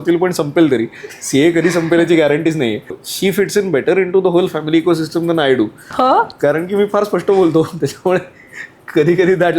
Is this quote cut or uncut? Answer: cut